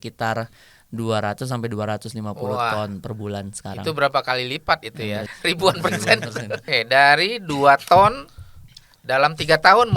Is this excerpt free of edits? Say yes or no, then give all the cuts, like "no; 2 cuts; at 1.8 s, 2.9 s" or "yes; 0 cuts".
no; 2 cuts; at 5.3 s, 6.6 s